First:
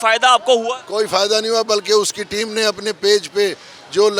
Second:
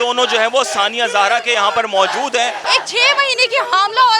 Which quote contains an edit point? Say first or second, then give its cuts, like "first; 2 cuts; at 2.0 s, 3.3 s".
second; 1 cut; at 2.6 s